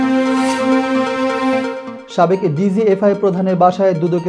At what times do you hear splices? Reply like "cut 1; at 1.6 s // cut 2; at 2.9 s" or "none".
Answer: none